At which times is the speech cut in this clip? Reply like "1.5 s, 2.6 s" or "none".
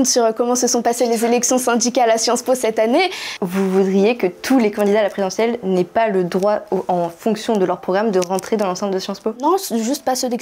3.3 s